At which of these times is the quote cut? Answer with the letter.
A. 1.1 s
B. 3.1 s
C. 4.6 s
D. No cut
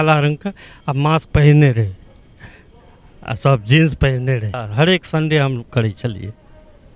C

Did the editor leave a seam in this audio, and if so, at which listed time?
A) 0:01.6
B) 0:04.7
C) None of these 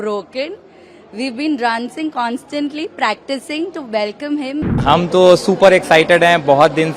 B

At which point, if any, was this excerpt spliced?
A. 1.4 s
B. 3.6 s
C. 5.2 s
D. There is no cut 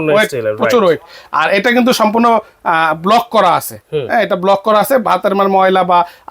D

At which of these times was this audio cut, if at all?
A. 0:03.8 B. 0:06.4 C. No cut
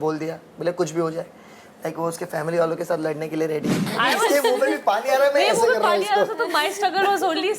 A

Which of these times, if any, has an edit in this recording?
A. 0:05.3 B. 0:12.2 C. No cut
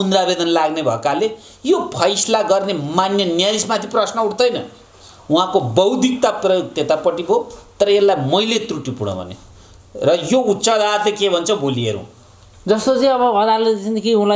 C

